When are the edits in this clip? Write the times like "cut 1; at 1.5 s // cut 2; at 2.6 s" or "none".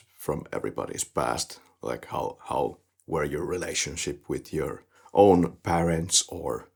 none